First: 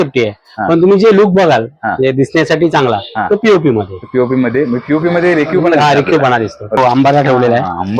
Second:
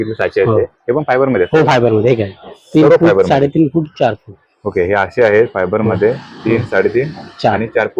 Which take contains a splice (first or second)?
first